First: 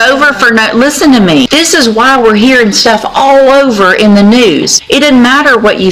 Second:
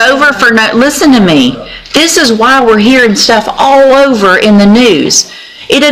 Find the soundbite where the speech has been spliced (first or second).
first